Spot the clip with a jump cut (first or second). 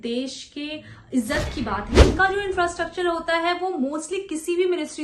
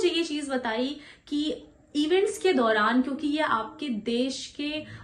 first